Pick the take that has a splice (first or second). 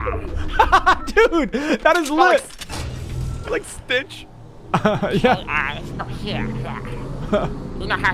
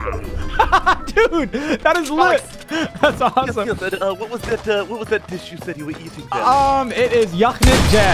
second